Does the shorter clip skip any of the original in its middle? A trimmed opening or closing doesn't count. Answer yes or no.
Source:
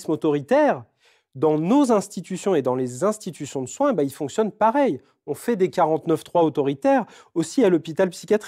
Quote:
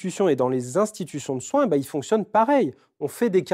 no